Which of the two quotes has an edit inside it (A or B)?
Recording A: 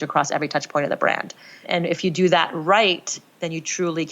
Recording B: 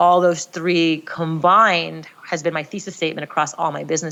A